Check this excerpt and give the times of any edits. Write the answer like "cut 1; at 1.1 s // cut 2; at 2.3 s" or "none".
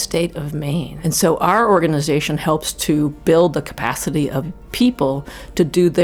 cut 1; at 0.9 s // cut 2; at 4.4 s